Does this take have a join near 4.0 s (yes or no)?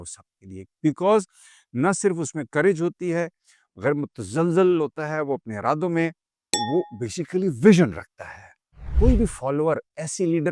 no